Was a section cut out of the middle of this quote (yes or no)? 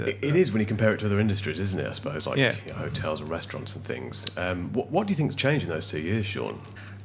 no